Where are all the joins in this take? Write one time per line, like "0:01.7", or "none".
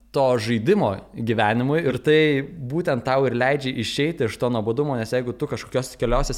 0:02.0